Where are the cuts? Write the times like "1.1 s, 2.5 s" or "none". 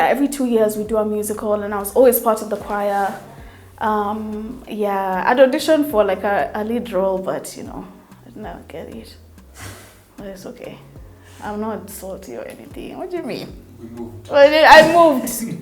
none